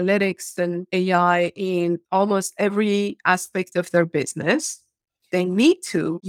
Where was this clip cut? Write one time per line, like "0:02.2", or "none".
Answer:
0:05.2